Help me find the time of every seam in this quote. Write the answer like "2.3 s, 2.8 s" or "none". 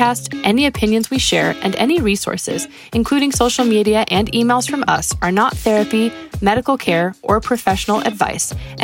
none